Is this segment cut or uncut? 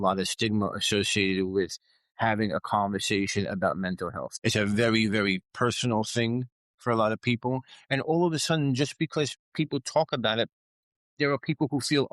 cut